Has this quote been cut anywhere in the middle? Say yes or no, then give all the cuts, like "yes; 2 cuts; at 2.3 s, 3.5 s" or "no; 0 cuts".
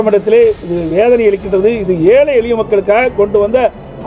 no; 0 cuts